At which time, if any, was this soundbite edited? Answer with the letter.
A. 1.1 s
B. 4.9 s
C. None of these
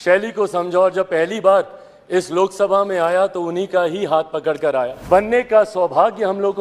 B